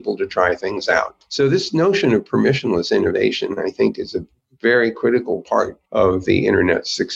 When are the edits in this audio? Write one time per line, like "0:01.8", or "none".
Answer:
0:01.2
0:05.8